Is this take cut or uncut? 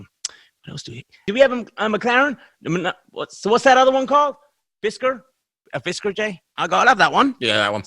cut